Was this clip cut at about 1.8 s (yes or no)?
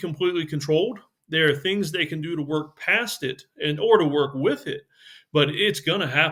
no